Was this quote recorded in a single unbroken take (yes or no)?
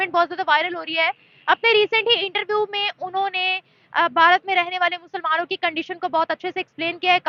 yes